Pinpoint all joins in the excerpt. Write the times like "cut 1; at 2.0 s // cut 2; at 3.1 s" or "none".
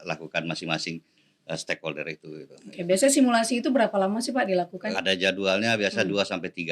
cut 1; at 4.8 s